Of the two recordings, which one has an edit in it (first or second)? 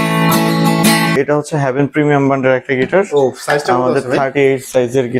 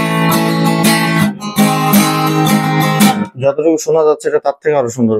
first